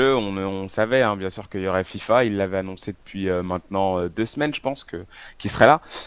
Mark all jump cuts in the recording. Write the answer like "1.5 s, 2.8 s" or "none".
1.9 s